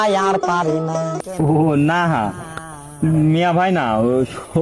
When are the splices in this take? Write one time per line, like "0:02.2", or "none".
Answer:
0:01.2